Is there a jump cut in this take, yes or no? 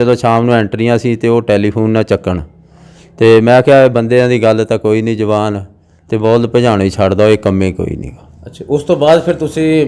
no